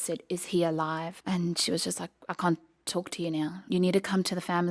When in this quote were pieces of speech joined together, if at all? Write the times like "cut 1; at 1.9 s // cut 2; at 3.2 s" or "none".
cut 1; at 1.1 s // cut 2; at 3.6 s